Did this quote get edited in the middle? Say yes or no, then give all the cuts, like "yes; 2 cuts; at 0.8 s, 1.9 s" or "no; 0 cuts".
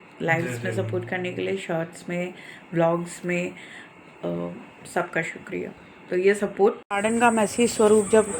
yes; 1 cut; at 6.8 s